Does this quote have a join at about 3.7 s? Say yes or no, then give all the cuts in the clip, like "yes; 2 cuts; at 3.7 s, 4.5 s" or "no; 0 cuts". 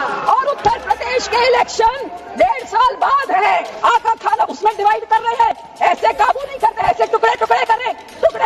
yes; 1 cut; at 3.7 s